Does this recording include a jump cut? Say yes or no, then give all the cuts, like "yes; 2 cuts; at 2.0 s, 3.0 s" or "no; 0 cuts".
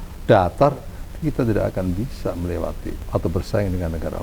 yes; 1 cut; at 2.9 s